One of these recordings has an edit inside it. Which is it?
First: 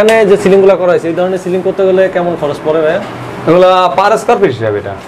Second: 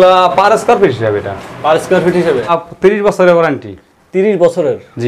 second; 1 cut; at 2.5 s

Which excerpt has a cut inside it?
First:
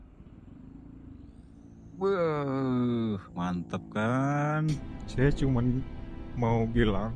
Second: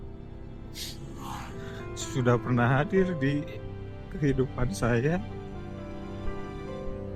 first; 1 cut; at 5.0 s

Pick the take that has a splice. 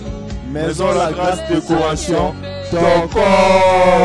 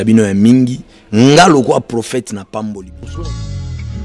second; 1 cut; at 2.9 s

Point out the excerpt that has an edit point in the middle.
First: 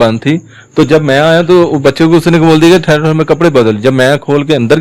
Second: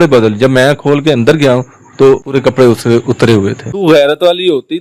second; 2 cuts; at 2.4 s, 3.6 s

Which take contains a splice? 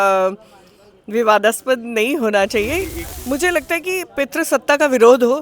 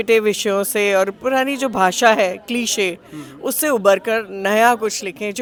first; 1 cut; at 3.1 s

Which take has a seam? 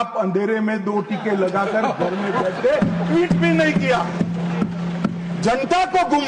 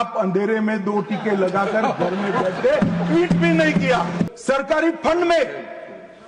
second; 1 cut; at 4.3 s

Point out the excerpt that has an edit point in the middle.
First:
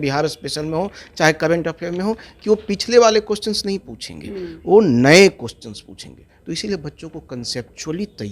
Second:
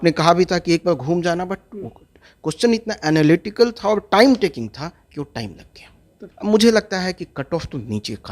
second; 1 cut; at 6.2 s

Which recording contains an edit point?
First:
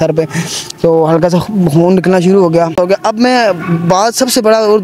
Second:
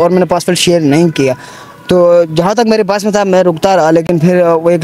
first; 1 cut; at 2.7 s

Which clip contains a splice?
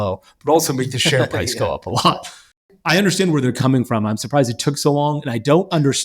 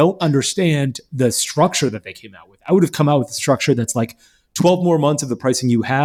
first; 1 cut; at 2.7 s

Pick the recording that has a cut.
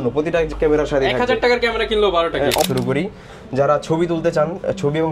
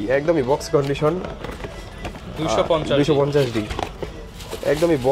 first; 1 cut; at 2.6 s

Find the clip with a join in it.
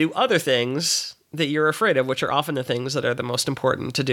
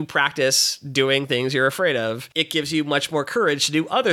second; 1 cut; at 2.3 s

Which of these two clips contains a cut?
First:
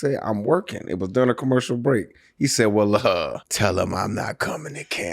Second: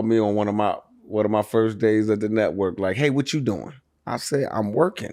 first; 1 cut; at 3.5 s

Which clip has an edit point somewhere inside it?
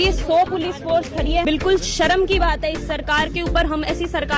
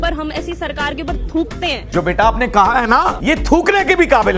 second; 2 cuts; at 1.8 s, 3.2 s

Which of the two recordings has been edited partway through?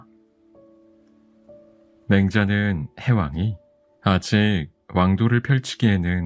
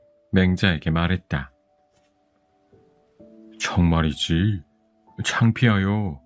second; 2 cuts; at 1.6 s, 3.6 s

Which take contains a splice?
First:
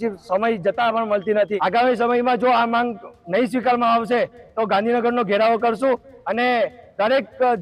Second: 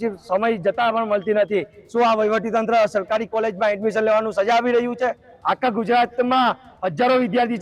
first; 1 cut; at 1.5 s

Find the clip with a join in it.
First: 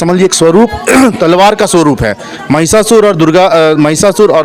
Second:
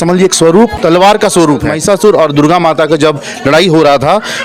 second; 2 cuts; at 0.8 s, 1.7 s

